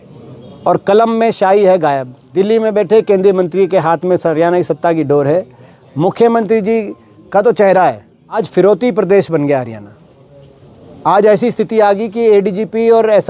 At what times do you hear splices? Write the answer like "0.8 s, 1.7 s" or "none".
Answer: 2.2 s, 8.4 s

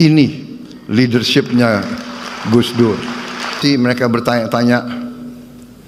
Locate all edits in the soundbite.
3.6 s

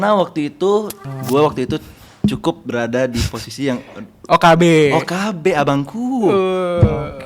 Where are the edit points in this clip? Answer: 1.0 s

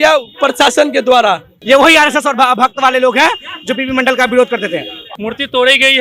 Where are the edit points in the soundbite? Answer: 1.5 s, 5.0 s

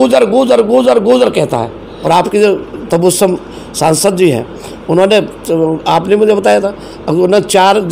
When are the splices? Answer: 1.8 s

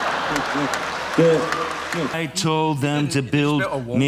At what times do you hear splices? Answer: 2.2 s

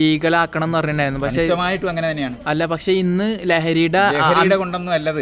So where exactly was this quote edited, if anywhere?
none

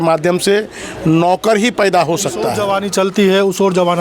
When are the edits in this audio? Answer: 2.6 s

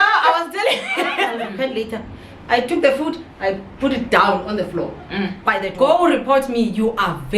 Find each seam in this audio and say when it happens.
1.3 s, 5.6 s

